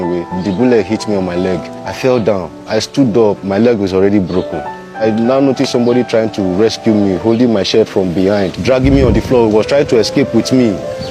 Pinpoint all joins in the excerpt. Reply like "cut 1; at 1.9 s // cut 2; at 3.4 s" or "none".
cut 1; at 5.0 s // cut 2; at 8.6 s

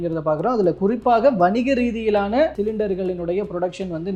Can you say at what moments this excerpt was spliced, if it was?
none

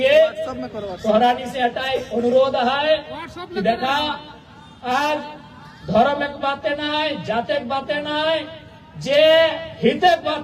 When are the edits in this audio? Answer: none

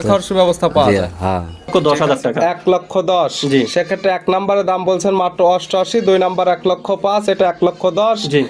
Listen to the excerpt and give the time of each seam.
cut 1; at 1.7 s

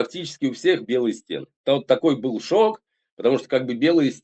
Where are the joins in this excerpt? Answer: none

